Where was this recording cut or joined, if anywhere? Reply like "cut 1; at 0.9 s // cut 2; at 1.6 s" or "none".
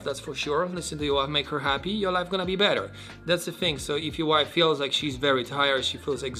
none